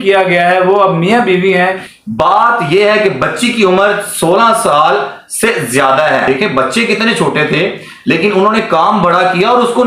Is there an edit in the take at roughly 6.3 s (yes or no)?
yes